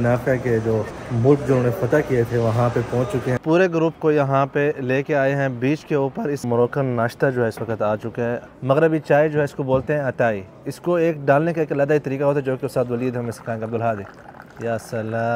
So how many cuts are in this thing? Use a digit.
4